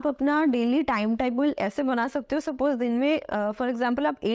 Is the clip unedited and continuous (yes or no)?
yes